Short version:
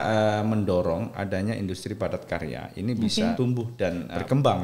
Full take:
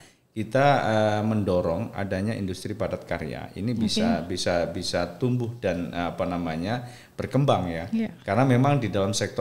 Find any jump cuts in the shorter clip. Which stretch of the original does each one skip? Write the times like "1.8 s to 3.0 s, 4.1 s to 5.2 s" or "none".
4.4 s to 6.6 s

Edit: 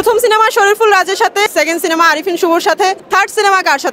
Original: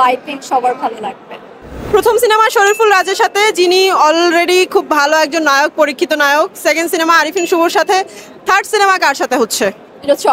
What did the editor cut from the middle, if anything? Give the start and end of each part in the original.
3.5 s to 6.6 s, 8.1 s to 8.4 s

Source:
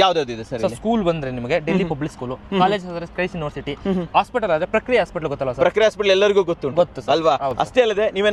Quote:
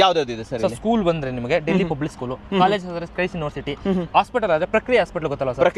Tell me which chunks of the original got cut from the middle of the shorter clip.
none

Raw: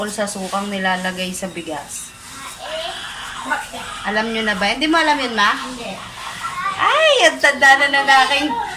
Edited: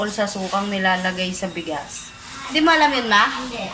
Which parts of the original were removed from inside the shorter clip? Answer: 2.5 s to 4.8 s

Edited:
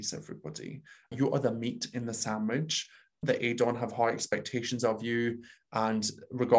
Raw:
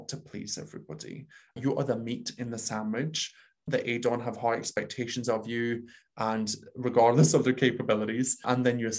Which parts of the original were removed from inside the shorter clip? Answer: none

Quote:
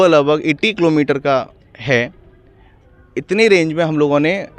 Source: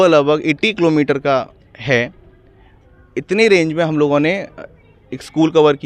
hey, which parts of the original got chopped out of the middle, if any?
none

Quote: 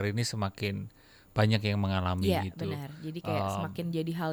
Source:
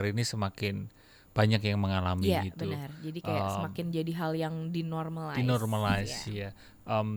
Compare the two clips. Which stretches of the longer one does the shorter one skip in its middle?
none

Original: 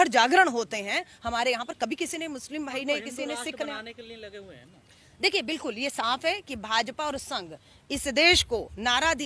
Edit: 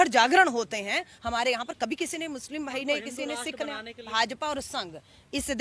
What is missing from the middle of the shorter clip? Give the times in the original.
4.1 s to 6.6 s

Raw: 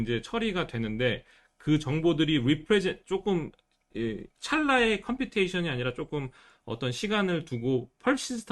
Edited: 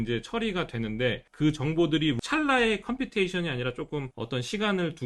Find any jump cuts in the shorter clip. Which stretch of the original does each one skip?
1.3 s to 1.5 s, 2.4 s to 4.4 s, 6.4 s to 6.7 s

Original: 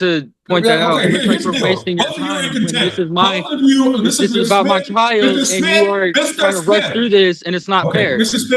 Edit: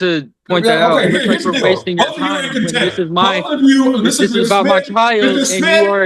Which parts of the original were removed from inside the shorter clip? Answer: none

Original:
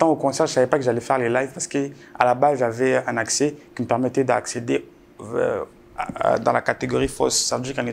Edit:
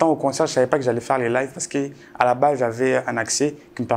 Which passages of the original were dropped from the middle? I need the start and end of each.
none

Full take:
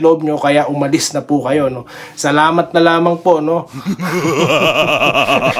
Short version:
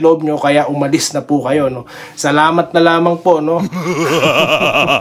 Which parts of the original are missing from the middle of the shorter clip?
3.7 s to 4.0 s

